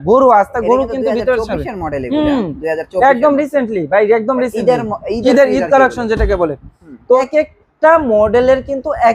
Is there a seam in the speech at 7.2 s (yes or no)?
yes